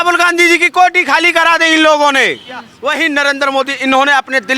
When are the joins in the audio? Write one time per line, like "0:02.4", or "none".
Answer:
0:02.7